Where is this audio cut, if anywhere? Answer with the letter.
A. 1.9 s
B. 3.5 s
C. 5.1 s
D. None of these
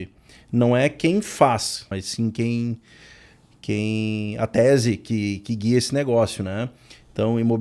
A